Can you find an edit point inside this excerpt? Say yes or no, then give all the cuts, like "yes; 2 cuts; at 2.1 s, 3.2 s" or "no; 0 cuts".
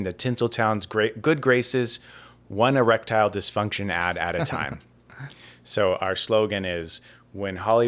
no; 0 cuts